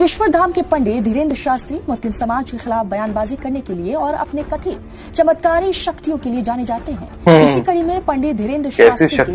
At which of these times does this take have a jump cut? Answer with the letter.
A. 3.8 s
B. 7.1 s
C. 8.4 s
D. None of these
D